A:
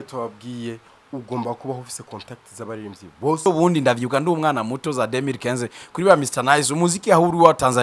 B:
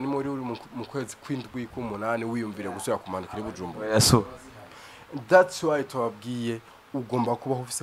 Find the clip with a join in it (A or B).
A